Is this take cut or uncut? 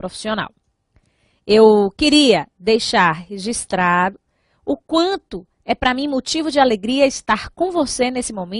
uncut